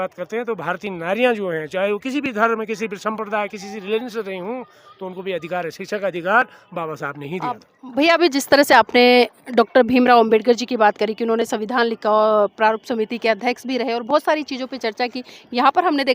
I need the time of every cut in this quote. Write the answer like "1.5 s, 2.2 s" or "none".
7.8 s

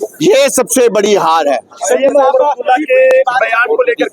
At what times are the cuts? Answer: none

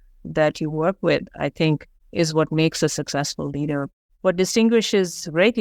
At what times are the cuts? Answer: 2.0 s, 4.0 s

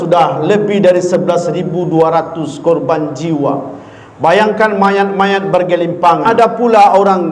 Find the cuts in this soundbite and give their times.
6.3 s

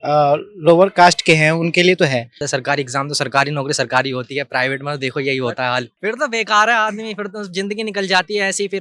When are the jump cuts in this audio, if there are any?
2.5 s, 5.9 s

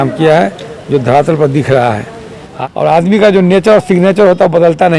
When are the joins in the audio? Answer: 2.5 s

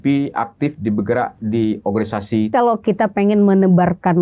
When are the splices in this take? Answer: 2.5 s

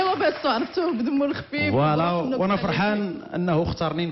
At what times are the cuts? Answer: none

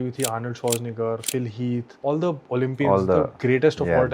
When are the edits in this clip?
1.9 s

